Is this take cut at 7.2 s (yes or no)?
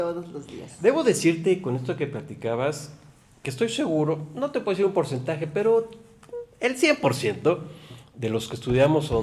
no